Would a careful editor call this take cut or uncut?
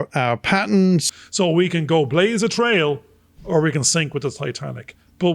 cut